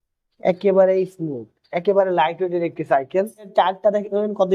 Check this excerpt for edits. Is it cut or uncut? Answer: uncut